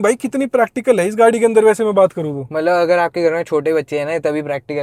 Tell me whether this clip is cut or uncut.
uncut